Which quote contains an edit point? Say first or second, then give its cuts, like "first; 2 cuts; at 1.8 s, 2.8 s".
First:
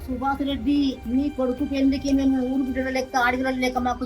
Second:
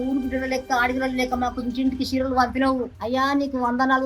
first; 1 cut; at 1.0 s